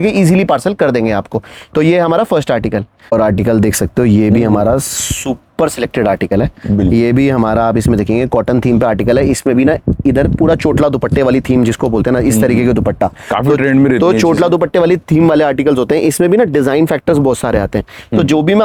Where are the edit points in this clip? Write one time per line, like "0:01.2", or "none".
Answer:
none

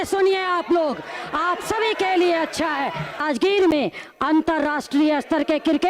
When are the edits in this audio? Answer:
0:03.2

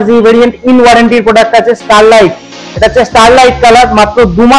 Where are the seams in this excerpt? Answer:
none

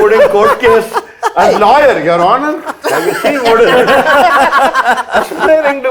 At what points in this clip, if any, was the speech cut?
none

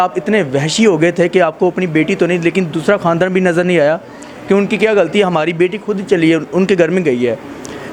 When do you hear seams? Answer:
none

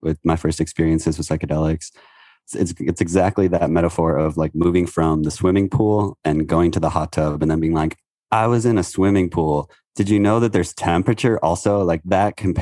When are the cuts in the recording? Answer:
0:02.4

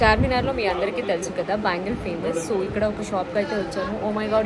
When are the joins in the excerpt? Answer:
none

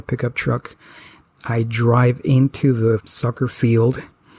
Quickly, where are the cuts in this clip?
0:03.1

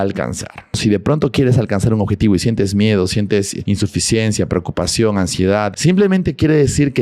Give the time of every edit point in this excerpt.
0:00.8
0:03.6
0:05.7

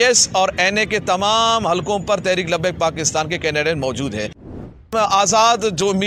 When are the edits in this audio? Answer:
0:04.7

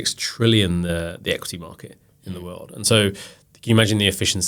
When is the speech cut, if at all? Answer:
none

